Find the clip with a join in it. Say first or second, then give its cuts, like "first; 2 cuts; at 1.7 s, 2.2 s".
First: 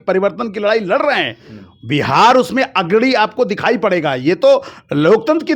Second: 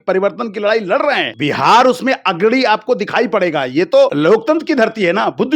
second; 2 cuts; at 1.3 s, 4.1 s